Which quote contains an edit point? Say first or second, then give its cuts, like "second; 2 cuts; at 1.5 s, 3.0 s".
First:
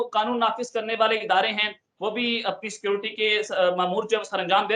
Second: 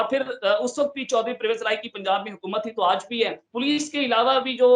second; 1 cut; at 3.4 s